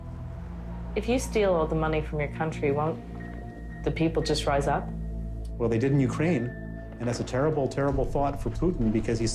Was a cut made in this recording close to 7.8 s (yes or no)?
no